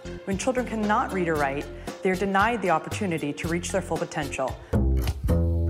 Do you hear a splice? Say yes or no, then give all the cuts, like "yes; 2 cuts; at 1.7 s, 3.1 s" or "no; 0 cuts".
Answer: yes; 1 cut; at 4.6 s